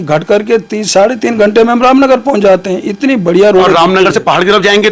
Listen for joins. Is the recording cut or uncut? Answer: uncut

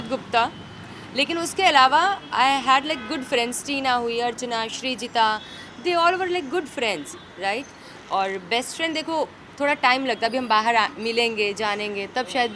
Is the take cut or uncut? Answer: uncut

